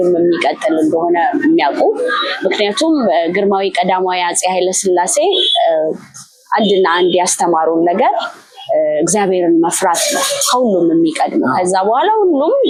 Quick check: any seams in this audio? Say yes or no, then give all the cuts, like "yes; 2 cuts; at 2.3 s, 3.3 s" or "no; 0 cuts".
no; 0 cuts